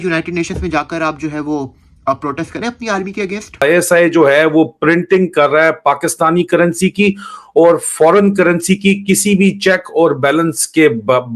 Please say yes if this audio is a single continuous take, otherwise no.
no